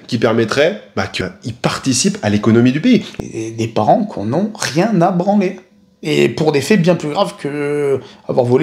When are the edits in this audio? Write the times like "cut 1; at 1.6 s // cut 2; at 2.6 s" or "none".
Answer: cut 1; at 1.1 s // cut 2; at 3.1 s